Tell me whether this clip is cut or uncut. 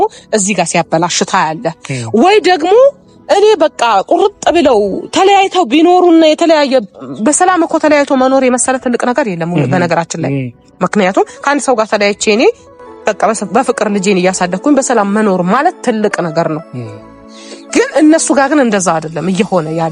uncut